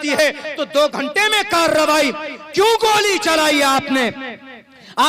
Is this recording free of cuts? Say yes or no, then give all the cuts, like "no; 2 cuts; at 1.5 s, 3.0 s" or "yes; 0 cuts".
yes; 0 cuts